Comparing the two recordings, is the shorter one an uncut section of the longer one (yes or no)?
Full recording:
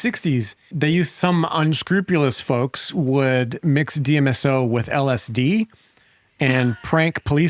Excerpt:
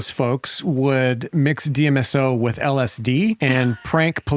no